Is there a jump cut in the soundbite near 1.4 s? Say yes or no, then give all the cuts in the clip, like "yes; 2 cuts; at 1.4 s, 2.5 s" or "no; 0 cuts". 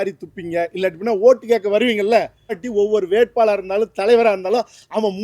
no; 1 cut; at 2.6 s